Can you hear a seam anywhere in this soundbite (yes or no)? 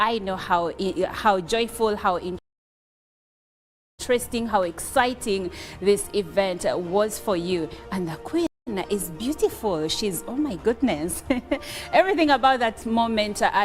no